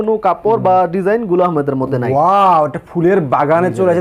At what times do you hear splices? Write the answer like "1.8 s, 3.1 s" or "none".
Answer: none